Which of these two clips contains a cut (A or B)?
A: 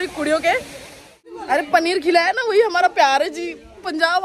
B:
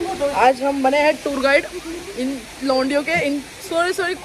A